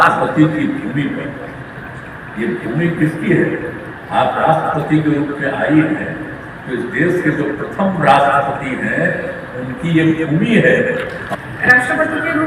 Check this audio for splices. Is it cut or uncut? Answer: cut